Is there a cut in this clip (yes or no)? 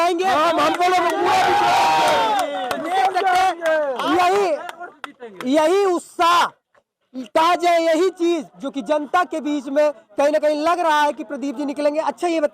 no